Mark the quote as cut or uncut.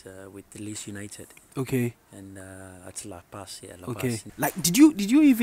cut